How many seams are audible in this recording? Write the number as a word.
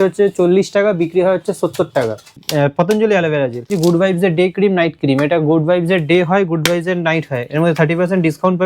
two